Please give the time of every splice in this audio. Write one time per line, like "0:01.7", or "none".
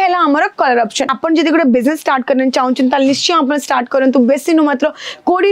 0:01.0